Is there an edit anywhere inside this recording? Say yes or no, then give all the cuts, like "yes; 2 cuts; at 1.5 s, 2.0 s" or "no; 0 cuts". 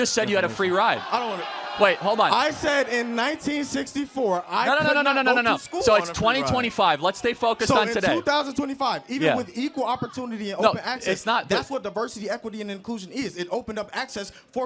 no; 0 cuts